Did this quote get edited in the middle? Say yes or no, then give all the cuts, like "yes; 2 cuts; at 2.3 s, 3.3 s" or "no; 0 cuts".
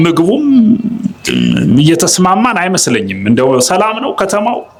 no; 0 cuts